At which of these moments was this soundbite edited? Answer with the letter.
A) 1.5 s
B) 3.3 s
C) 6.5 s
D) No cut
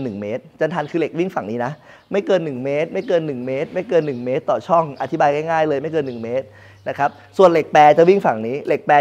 D